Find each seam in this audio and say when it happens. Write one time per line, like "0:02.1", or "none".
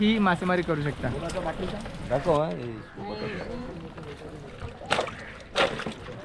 0:01.9